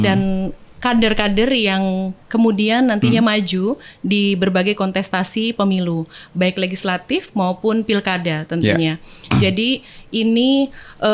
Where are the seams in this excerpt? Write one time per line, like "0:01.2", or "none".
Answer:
none